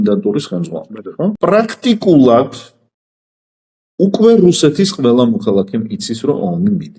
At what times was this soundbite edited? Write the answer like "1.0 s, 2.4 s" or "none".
1.4 s